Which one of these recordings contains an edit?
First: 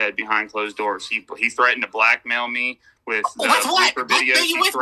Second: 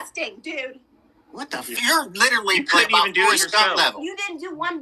second; 1 cut; at 1.7 s

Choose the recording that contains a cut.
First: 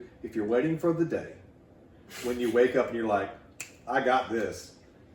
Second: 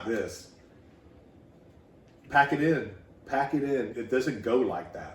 second; 1 cut; at 3.9 s

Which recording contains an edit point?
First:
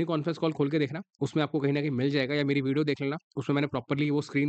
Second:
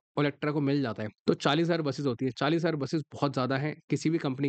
second; 1 cut; at 1.1 s

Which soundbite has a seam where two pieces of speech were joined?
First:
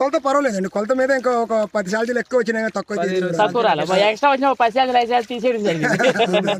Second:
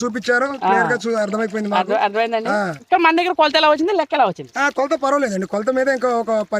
second; 1 cut; at 2.8 s

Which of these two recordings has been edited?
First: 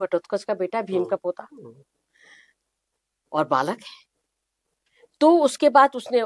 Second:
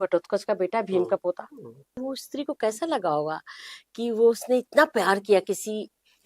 second; 1 cut; at 2.0 s

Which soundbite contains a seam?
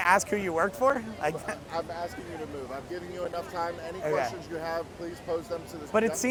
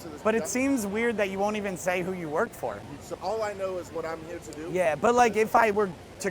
second; 1 cut; at 3.0 s

